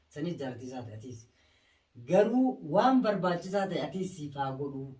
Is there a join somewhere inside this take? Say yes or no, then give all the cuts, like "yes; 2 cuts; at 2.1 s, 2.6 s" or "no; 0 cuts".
no; 0 cuts